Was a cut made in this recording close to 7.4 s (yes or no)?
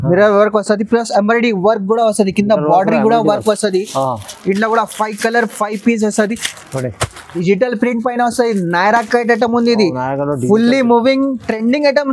yes